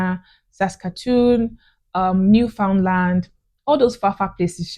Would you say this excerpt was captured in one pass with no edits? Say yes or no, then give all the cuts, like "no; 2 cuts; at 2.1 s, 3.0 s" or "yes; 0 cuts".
yes; 0 cuts